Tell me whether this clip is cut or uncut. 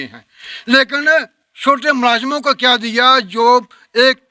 uncut